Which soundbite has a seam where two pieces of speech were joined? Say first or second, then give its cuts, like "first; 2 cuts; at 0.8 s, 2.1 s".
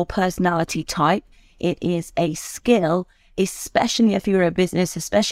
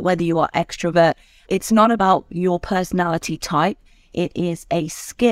second; 1 cut; at 1.5 s